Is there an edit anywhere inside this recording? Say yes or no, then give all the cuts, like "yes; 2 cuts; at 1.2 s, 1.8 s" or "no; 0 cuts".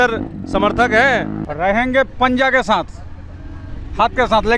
yes; 1 cut; at 1.4 s